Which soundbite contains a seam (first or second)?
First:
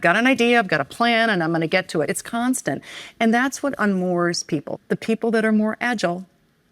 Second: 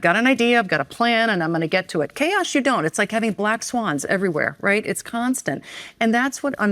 first